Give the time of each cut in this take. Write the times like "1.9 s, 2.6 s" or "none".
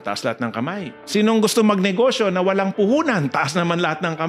1.0 s